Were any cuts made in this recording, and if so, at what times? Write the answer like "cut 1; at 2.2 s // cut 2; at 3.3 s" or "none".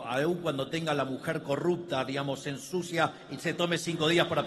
none